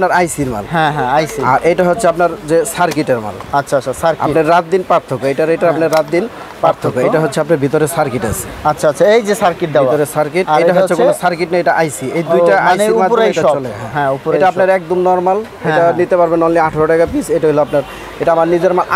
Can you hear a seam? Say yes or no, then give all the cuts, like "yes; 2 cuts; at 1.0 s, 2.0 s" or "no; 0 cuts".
no; 0 cuts